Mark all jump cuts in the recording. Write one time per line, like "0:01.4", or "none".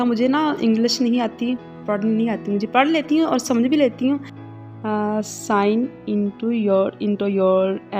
0:01.7
0:04.4